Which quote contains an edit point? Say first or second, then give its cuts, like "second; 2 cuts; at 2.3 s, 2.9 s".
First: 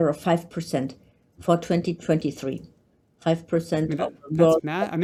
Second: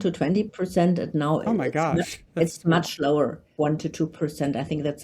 second; 1 cut; at 3.4 s